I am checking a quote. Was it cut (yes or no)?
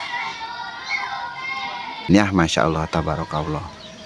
yes